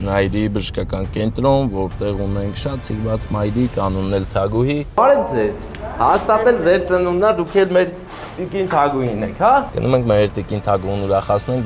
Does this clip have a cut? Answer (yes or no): yes